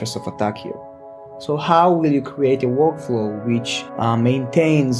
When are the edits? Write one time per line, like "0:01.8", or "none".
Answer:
0:03.8